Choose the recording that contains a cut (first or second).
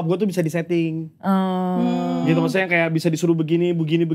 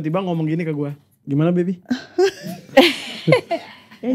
second